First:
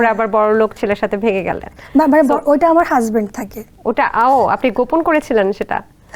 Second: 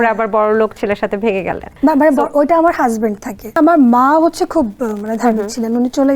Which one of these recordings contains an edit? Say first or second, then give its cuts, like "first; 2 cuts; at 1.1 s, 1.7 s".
second; 2 cuts; at 1.6 s, 3.6 s